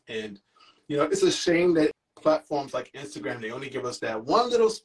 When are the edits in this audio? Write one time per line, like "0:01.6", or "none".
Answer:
0:02.0